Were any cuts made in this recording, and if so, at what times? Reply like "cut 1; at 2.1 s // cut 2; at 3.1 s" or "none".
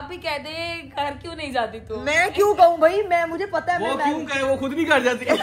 none